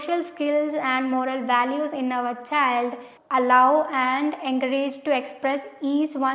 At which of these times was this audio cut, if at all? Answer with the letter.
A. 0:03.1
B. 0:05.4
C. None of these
A